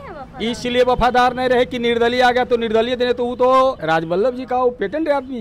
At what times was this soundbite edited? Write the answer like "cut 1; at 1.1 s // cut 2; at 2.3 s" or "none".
cut 1; at 3.8 s